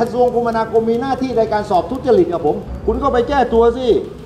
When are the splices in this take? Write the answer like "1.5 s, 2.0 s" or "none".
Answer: 2.7 s